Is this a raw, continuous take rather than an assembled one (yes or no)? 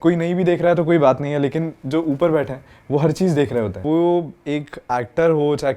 no